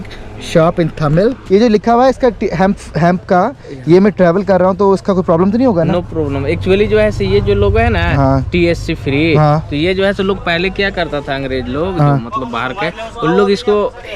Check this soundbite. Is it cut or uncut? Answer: cut